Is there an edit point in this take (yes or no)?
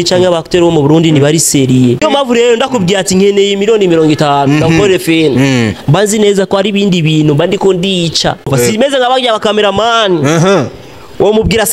yes